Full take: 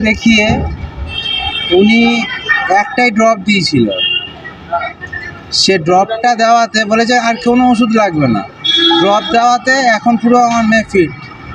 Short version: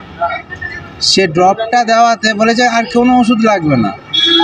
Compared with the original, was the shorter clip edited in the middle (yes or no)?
no